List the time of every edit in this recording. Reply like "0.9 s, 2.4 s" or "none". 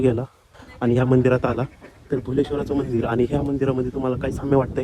none